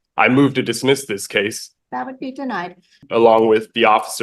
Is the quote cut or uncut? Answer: cut